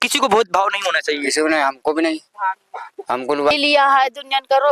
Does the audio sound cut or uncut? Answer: cut